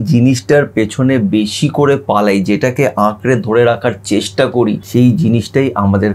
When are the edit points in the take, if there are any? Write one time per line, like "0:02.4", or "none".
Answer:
0:04.8